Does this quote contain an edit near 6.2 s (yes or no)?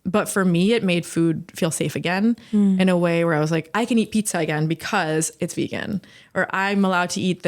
no